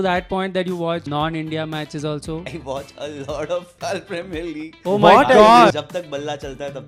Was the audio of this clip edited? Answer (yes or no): yes